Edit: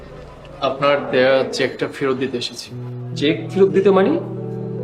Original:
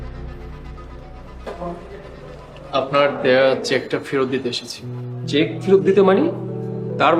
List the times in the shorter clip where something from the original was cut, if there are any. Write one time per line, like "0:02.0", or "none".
none